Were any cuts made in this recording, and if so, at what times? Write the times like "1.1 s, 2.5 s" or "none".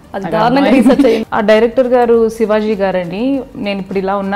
1.2 s